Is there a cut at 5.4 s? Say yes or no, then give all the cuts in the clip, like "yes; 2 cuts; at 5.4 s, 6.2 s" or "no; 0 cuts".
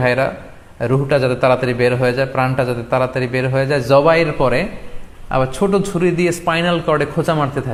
no; 0 cuts